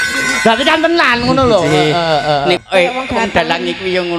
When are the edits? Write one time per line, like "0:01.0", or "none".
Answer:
0:02.6